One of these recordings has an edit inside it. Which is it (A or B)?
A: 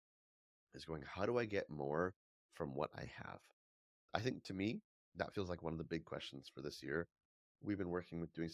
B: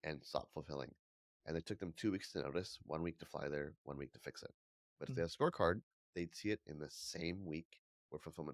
A